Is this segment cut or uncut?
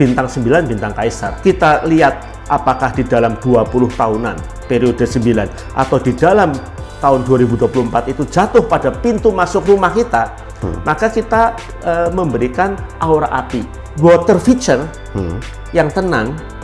cut